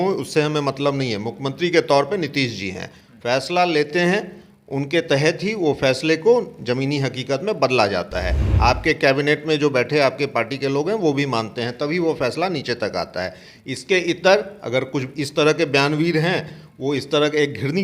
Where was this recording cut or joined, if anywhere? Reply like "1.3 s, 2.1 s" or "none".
8.4 s